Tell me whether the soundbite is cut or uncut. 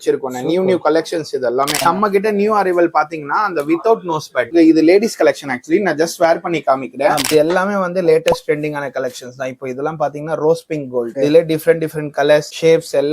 cut